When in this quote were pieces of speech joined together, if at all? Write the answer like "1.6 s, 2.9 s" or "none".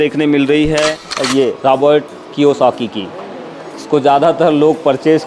1.1 s